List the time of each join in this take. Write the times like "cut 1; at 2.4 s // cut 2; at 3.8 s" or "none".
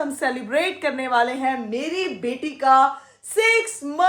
none